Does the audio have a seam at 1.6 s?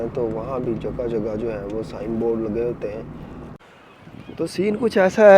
no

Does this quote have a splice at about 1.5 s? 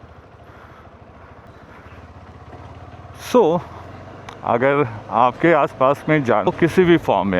no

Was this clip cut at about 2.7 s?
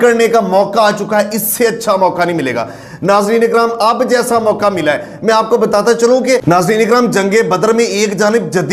no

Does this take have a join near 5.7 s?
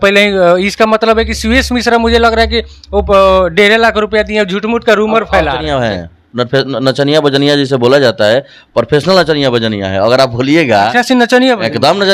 yes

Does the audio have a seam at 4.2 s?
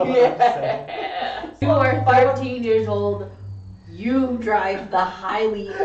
no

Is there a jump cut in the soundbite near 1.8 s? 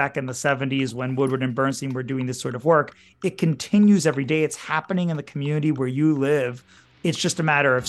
no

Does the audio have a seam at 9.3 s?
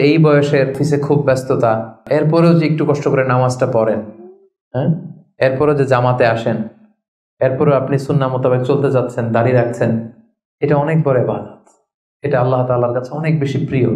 no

